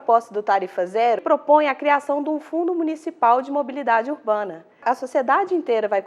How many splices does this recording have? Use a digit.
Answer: 2